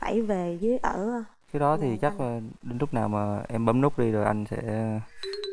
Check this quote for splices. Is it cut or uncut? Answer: uncut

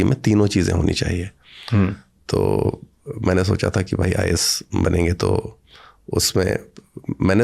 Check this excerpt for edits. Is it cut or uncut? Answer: uncut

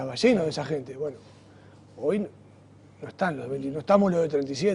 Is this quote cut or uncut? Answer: uncut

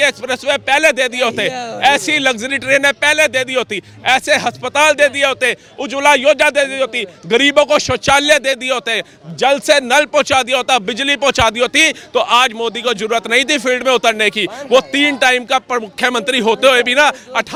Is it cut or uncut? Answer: uncut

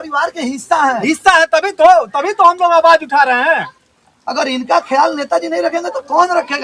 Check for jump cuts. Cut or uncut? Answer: uncut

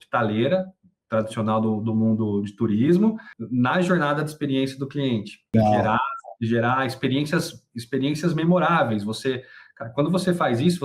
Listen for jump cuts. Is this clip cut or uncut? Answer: cut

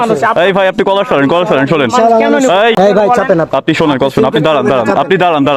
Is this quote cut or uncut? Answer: cut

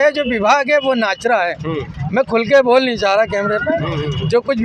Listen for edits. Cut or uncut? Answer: uncut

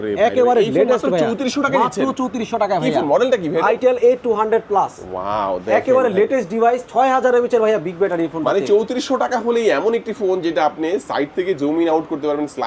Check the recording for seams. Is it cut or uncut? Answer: uncut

